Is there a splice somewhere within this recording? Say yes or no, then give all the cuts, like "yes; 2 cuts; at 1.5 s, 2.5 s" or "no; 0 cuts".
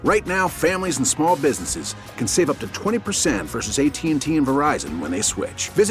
no; 0 cuts